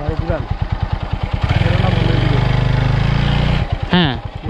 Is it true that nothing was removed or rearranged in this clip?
yes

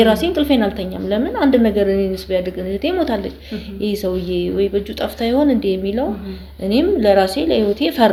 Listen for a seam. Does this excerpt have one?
no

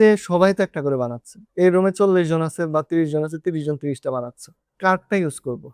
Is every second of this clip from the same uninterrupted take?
yes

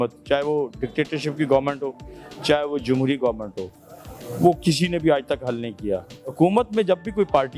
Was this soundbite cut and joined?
yes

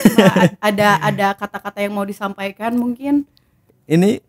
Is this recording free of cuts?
yes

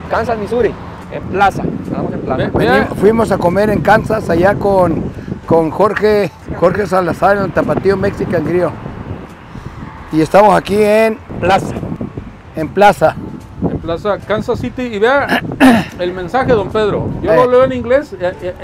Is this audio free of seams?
yes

